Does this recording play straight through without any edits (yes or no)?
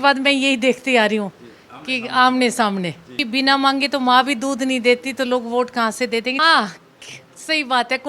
no